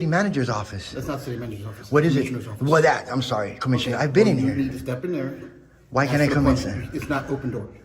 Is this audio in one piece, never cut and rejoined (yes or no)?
yes